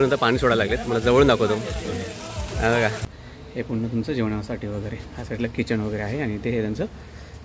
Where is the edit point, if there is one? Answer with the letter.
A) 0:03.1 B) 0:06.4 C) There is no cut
A